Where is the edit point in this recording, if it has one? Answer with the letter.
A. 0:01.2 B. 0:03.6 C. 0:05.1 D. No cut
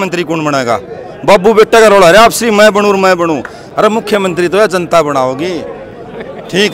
D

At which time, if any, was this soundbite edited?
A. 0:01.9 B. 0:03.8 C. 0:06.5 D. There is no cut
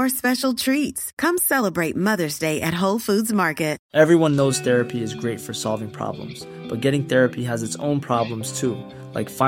B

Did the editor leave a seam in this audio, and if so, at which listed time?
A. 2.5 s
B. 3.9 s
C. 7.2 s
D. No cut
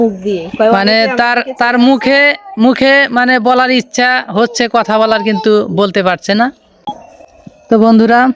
C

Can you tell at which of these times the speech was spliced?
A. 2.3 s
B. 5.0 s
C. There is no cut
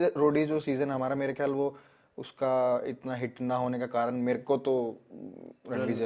C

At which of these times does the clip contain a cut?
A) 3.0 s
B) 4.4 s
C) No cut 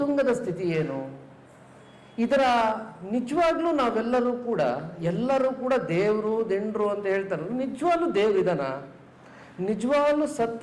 C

